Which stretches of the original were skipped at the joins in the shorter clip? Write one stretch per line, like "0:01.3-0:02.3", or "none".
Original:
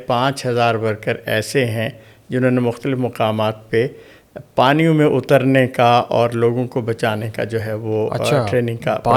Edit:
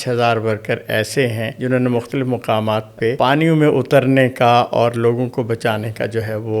0:01.9-0:02.2
0:03.9-0:04.5